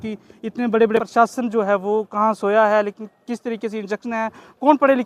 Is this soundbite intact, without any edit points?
no; 1 cut; at 1.0 s

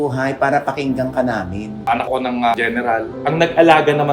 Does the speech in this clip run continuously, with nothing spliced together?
no; 2 cuts; at 2.0 s, 3.2 s

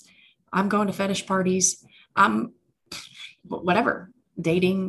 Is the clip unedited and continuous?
yes; 0 cuts

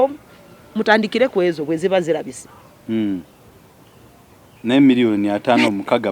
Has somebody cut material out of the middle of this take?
no; 0 cuts

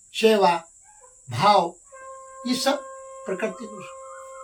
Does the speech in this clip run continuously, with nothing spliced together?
yes; 0 cuts

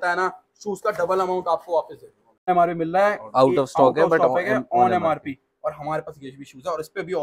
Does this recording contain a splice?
yes; 1 cut; at 2.5 s

